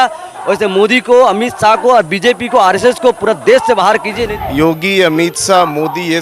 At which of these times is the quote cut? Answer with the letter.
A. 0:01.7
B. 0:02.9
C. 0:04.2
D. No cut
C